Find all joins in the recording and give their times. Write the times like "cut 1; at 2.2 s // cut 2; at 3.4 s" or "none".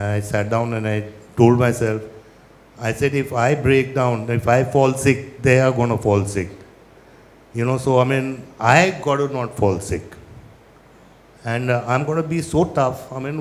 none